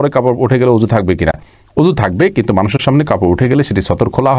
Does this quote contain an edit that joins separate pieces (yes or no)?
no